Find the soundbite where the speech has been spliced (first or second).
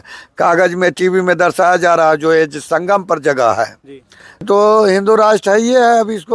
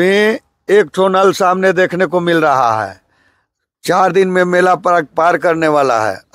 first